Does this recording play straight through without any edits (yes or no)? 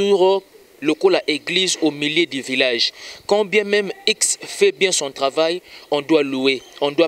yes